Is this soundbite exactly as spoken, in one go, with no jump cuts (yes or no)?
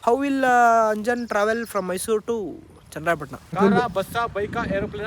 no